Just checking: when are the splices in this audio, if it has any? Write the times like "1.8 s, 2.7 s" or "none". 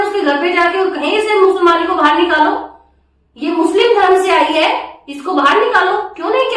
none